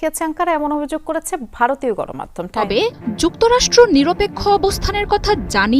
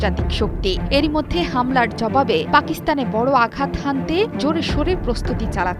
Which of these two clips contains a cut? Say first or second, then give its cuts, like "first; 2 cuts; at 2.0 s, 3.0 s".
first; 1 cut; at 2.7 s